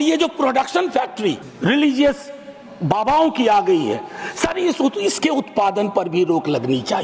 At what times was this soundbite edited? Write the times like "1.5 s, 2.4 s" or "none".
1.5 s